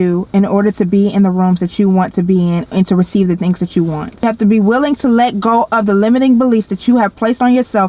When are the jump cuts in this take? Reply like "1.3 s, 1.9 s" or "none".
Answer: 4.2 s